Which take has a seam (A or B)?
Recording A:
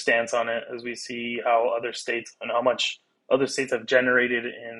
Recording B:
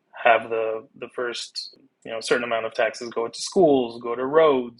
B